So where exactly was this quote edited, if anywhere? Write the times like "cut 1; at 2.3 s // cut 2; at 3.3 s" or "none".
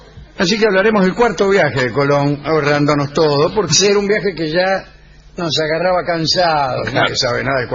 cut 1; at 4.7 s